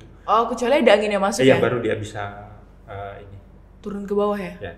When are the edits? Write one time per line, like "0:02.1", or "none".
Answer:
none